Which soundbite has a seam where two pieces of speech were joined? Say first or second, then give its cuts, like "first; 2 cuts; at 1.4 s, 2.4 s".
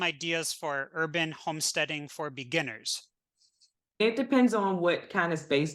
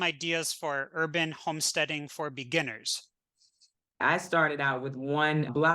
second; 1 cut; at 3.8 s